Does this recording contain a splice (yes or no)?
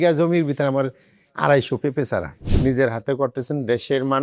yes